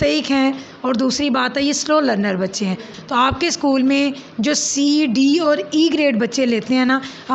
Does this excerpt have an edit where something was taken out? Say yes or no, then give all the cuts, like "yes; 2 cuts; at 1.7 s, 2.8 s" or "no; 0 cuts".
yes; 1 cut; at 2.9 s